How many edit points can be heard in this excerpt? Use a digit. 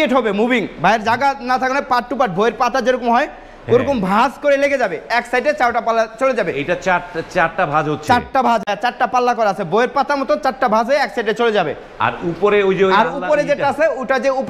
0